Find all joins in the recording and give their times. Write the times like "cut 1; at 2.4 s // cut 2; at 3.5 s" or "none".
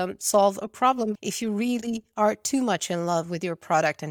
cut 1; at 1.1 s